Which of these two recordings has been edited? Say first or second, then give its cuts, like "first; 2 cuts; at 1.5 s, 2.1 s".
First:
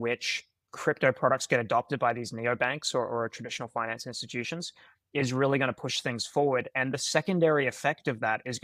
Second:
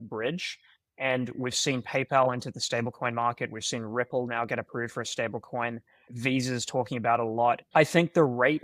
second; 2 cuts; at 6.1 s, 7.6 s